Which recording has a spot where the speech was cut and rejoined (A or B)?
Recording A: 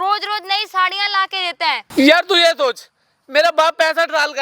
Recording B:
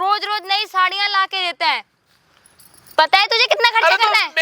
A